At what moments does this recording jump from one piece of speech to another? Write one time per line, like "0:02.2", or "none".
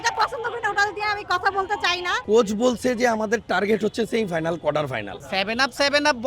0:02.1
0:05.1